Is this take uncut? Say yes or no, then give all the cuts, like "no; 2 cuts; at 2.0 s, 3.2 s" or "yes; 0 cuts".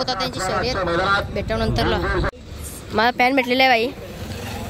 no; 1 cut; at 2.3 s